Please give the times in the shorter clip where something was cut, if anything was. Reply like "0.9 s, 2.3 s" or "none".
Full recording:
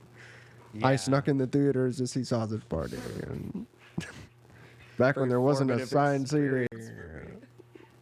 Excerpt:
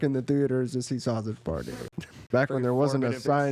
1.9 s